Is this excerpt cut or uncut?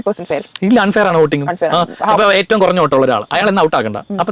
uncut